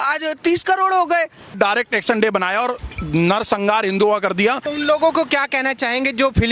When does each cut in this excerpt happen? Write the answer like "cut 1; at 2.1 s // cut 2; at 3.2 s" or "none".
cut 1; at 1.6 s // cut 2; at 4.6 s